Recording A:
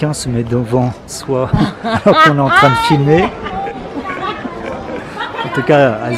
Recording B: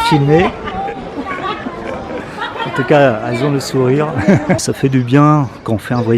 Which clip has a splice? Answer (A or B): B